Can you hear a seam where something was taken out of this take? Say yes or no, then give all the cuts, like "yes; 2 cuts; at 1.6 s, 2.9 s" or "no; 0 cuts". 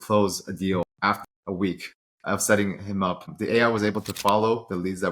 yes; 1 cut; at 1.1 s